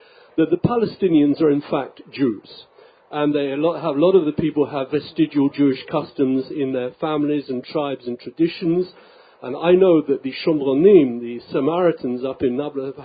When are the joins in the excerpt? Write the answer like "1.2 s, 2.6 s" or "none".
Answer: none

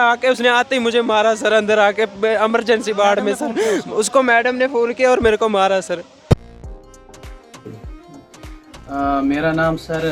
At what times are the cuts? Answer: 6.3 s

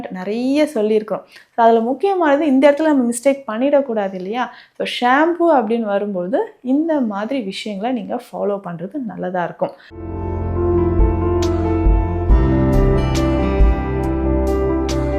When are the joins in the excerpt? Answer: 9.9 s

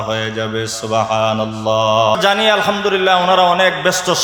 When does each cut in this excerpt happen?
2.2 s

